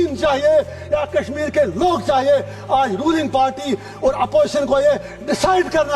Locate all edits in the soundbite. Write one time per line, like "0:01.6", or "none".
none